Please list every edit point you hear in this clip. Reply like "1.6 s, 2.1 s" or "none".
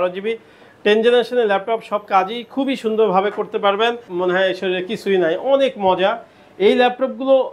4.1 s